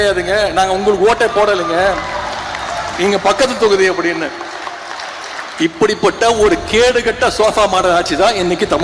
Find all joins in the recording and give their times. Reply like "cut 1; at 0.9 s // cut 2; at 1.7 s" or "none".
none